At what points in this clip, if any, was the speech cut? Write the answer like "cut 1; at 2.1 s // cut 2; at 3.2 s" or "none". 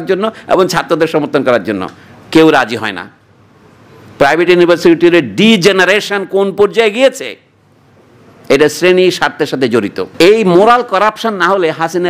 cut 1; at 10.0 s